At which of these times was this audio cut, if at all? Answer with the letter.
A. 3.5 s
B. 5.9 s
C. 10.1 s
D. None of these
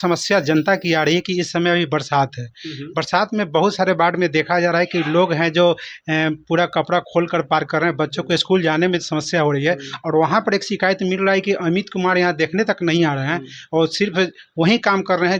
D